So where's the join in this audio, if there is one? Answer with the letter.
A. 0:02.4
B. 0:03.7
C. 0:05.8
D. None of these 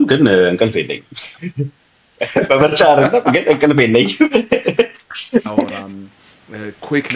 C